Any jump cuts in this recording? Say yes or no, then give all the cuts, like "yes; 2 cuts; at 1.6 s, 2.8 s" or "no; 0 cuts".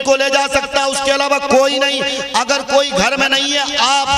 no; 0 cuts